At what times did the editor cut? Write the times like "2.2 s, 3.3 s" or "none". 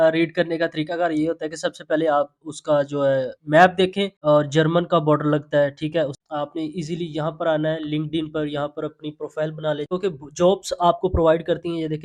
4.1 s, 6.2 s, 9.9 s